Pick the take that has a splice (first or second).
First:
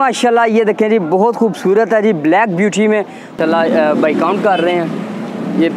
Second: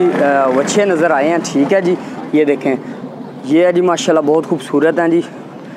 first